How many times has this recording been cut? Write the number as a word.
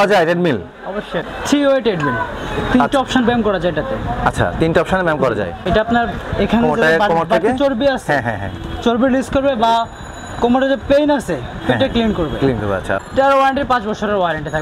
three